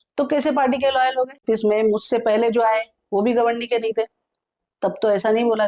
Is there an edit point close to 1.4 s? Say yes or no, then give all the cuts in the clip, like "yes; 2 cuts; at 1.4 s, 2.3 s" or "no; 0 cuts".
yes; 1 cut; at 1.4 s